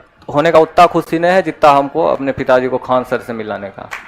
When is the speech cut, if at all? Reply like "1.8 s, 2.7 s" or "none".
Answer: none